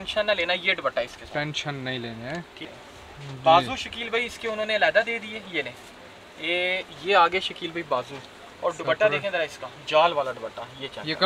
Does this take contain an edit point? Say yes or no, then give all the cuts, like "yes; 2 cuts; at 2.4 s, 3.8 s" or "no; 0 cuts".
yes; 1 cut; at 2.7 s